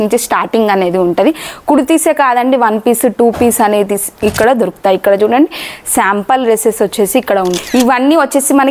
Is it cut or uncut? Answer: cut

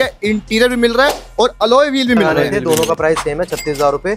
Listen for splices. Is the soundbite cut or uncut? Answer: cut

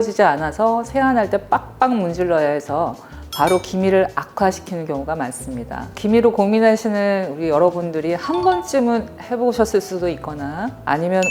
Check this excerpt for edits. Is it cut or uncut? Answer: cut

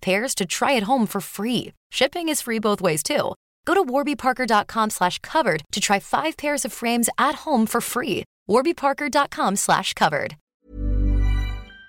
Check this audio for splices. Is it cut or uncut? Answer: cut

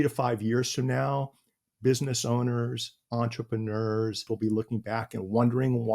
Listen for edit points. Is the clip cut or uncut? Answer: cut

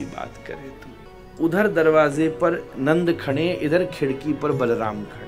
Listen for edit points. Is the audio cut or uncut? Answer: cut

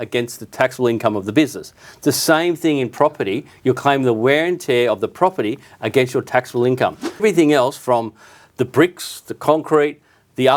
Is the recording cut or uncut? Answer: cut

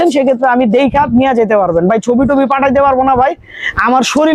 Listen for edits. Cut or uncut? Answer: uncut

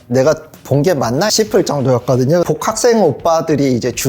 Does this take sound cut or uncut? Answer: cut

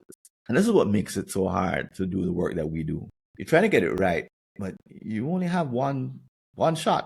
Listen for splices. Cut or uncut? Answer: uncut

